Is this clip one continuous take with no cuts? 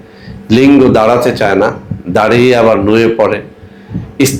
yes; 0 cuts

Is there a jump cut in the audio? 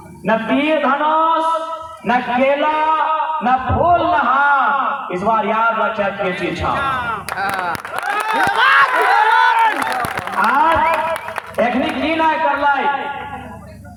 no; 0 cuts

